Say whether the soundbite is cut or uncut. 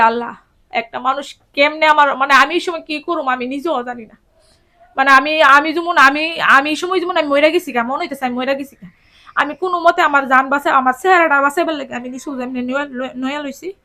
uncut